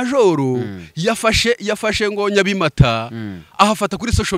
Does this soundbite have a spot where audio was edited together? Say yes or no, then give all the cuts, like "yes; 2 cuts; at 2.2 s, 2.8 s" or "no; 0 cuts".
no; 0 cuts